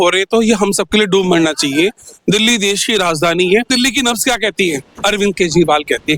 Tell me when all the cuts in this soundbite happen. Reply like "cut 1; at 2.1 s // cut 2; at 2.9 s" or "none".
cut 1; at 3.7 s